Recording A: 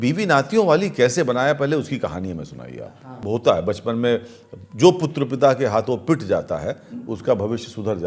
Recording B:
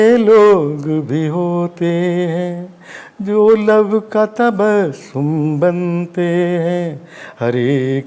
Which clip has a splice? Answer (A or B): A